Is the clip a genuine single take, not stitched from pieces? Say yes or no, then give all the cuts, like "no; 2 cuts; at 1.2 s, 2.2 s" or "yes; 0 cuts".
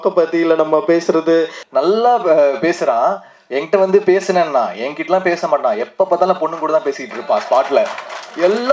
no; 1 cut; at 1.6 s